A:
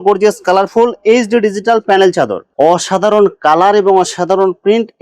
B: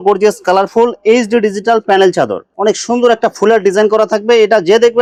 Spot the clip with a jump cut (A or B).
A